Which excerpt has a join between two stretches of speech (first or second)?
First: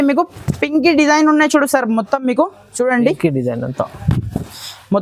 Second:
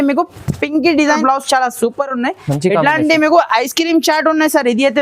second